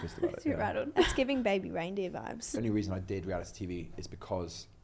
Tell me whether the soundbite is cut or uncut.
cut